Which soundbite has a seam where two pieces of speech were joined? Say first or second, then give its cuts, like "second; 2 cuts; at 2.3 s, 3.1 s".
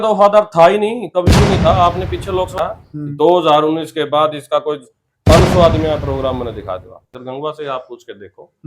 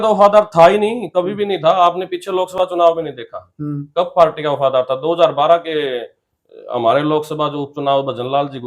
first; 2 cuts; at 2.5 s, 7.1 s